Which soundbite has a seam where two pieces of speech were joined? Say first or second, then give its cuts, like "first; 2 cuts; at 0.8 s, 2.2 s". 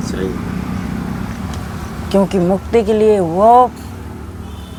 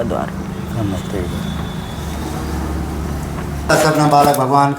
second; 1 cut; at 3.7 s